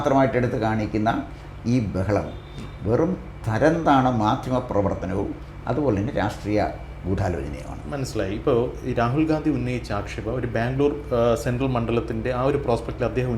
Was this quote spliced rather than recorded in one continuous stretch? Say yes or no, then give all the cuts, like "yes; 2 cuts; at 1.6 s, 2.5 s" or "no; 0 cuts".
no; 0 cuts